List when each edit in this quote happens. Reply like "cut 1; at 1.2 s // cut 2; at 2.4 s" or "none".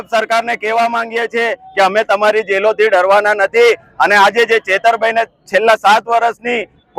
none